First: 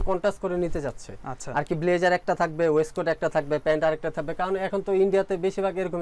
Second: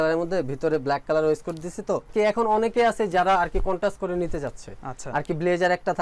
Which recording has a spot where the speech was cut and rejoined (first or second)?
second